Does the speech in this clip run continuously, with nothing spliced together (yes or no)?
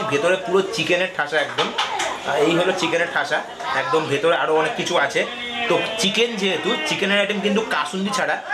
yes